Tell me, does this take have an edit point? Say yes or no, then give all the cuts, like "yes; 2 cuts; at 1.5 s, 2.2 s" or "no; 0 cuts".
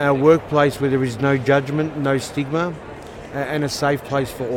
no; 0 cuts